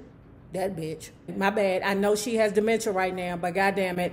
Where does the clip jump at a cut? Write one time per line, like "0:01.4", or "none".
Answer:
0:01.3